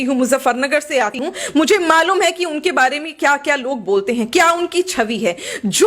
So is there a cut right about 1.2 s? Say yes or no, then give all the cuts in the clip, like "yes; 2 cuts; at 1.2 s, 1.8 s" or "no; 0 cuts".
yes; 1 cut; at 1.2 s